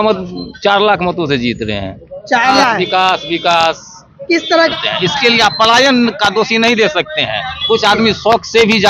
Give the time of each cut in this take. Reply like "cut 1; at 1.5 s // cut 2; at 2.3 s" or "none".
cut 1; at 2.6 s // cut 2; at 4.7 s